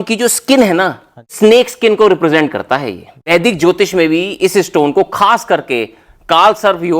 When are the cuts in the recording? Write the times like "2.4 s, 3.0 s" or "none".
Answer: 1.3 s, 3.3 s